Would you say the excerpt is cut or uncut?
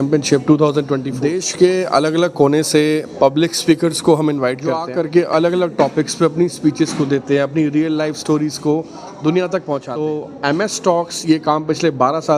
cut